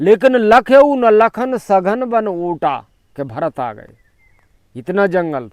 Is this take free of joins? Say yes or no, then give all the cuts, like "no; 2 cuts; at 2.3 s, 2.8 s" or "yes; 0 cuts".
yes; 0 cuts